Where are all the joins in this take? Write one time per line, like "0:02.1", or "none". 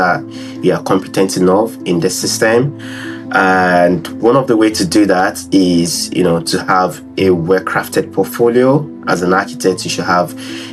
none